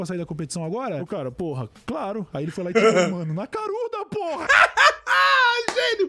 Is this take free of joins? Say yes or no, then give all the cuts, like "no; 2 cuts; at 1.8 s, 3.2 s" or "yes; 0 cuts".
no; 1 cut; at 4.5 s